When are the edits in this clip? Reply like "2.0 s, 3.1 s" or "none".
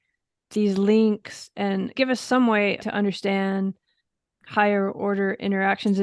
1.9 s, 2.8 s, 4.3 s